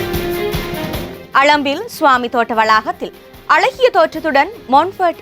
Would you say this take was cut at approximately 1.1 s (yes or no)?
yes